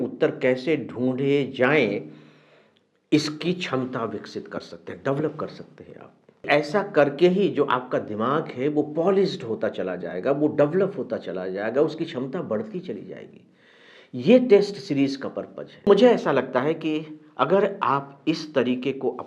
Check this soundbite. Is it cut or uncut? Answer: cut